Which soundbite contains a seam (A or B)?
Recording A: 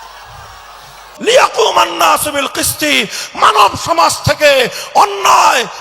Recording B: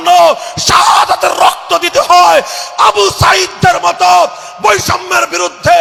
A